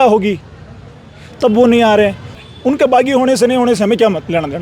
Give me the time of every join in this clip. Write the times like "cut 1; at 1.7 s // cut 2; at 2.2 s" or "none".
cut 1; at 2.3 s